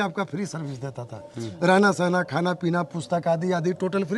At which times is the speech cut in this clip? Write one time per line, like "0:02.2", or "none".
none